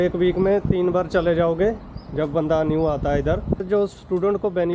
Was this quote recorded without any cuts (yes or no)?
no